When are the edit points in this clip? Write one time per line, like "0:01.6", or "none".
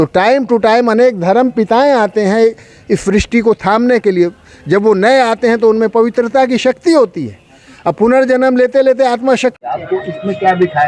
none